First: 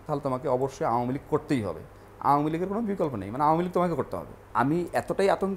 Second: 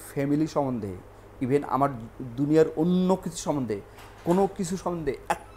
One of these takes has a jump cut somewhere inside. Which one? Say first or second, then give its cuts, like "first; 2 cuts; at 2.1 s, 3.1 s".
first; 1 cut; at 4.4 s